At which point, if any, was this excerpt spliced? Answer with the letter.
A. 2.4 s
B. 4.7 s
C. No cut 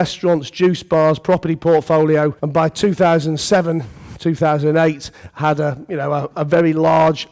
A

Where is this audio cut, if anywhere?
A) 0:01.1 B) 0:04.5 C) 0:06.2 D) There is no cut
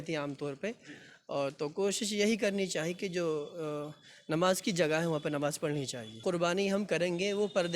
C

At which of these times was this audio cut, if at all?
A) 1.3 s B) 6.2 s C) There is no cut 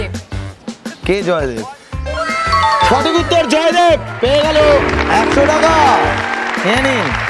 C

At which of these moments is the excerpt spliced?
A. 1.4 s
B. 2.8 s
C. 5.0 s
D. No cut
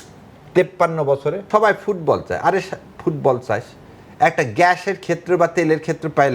A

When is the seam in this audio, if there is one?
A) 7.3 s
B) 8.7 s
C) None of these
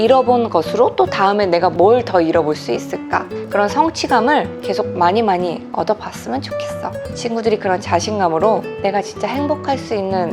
B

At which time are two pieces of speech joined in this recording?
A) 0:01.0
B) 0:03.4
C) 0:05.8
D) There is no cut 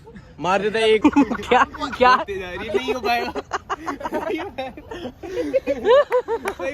A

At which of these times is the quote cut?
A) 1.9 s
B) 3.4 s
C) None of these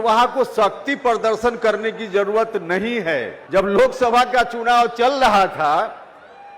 B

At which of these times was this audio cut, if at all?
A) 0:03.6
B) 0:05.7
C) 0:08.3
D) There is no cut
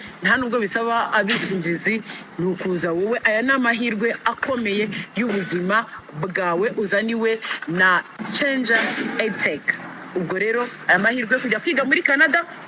D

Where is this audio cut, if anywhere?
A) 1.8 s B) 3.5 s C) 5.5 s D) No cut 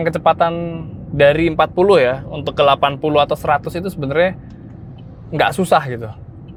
D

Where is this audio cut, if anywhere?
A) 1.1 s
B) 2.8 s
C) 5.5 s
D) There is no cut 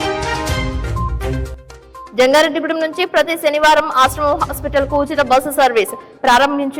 A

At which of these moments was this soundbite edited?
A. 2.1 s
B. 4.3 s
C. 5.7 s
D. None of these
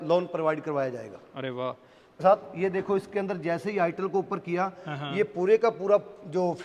A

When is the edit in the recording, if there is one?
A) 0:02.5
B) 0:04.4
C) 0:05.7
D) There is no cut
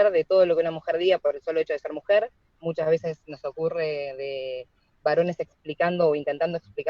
A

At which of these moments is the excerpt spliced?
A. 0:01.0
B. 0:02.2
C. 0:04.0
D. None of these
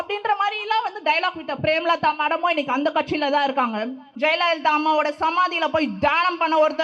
C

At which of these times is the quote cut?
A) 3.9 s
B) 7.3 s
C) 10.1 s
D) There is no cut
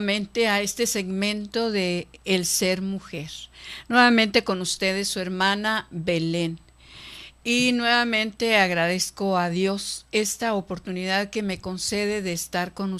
C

